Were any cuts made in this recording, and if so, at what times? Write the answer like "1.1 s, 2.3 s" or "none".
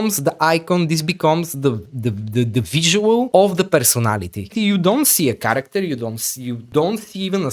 3.3 s, 4.5 s, 6.6 s